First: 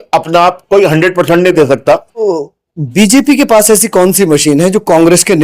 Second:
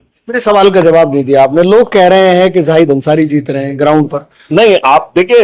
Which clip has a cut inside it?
first; 1 cut; at 2.3 s

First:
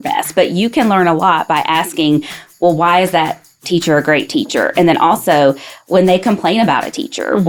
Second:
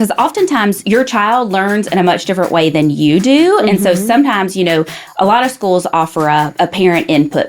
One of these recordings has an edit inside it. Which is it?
second; 2 cuts; at 0.8 s, 6.5 s

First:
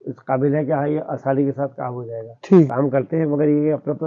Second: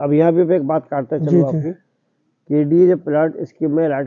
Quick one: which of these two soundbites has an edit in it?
first; 1 cut; at 2.7 s

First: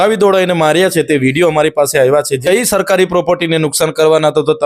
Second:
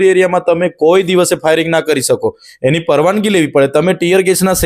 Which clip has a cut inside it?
first; 1 cut; at 2.3 s

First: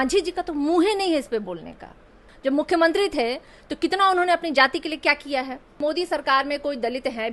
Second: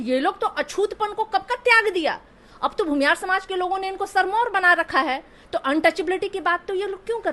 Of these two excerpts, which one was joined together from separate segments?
first; 2 cuts; at 2.3 s, 5.8 s

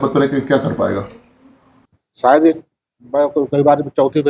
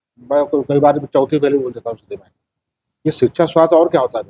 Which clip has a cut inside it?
first; 1 cut; at 1.7 s

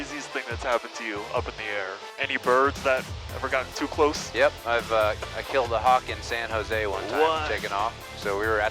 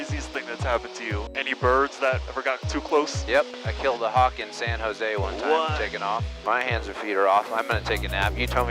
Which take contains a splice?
second; 4 cuts; at 1.3 s, 2.3 s, 3.5 s, 6.3 s

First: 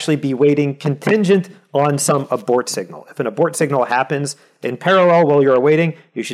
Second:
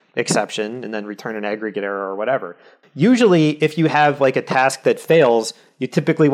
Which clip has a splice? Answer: second; 1 cut; at 2.8 s

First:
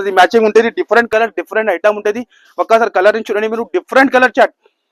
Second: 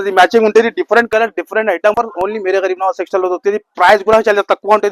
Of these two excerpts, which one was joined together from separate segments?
second; 1 cut; at 1.9 s

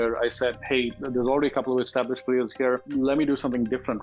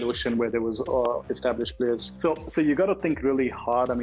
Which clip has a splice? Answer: second; 1 cut; at 2.1 s

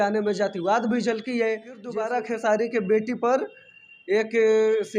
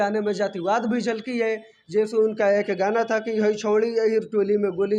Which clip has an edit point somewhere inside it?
first; 1 cut; at 1.8 s

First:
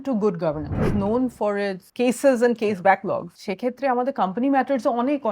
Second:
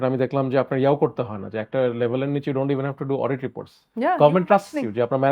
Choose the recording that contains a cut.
first; 3 cuts; at 0.9 s, 1.8 s, 3.4 s

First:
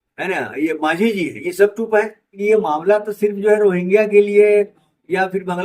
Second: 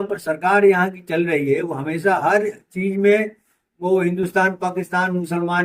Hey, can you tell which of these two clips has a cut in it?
first; 1 cut; at 2.4 s

